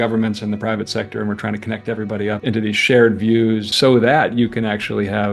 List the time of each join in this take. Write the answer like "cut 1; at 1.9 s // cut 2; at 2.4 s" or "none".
cut 1; at 2.4 s // cut 2; at 3.7 s